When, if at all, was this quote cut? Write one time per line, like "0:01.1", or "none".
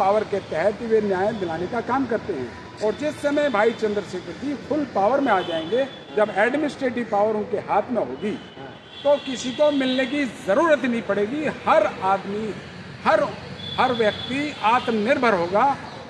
none

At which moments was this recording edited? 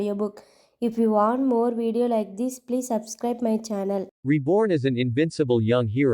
0:04.1

